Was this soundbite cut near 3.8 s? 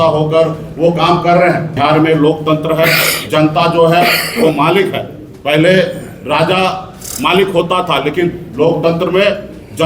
no; 1 cut; at 1.7 s

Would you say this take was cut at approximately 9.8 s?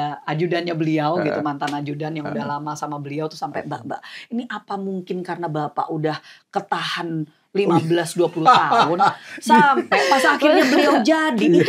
no; 0 cuts

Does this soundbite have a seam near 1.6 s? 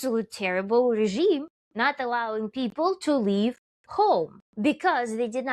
yes; 2 cuts; at 1.6 s, 4.4 s

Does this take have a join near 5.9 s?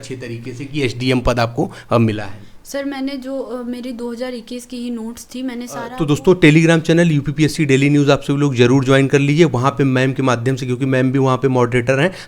yes; 1 cut; at 5.9 s

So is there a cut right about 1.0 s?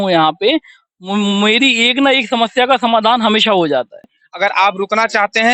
no; 1 cut; at 4.2 s

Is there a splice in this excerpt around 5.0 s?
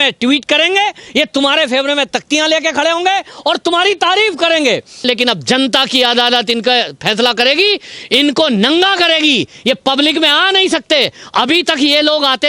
yes; 1 cut; at 5.0 s

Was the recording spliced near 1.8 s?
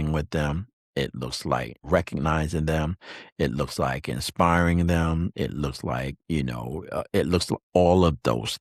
yes; 1 cut; at 1.8 s

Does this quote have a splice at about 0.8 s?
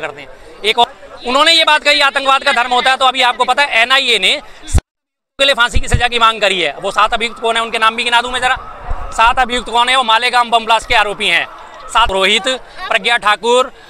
yes; 2 cuts; at 0.8 s, 12.1 s

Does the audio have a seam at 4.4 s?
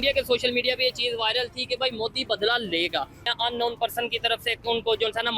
no; 1 cut; at 3.2 s

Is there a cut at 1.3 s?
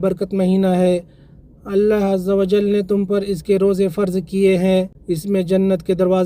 no; 1 cut; at 5.0 s

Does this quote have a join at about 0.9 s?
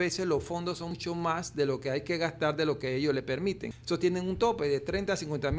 yes; 2 cuts; at 0.9 s, 3.7 s

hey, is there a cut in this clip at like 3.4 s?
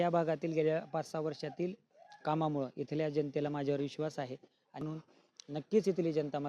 no; 1 cut; at 4.8 s

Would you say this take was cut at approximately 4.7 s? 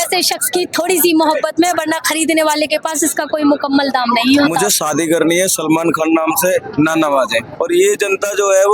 yes; 2 cuts; at 4.7 s, 7.5 s

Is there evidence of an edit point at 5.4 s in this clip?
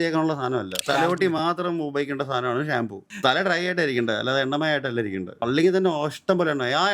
yes; 3 cuts; at 0.8 s, 3.1 s, 5.4 s

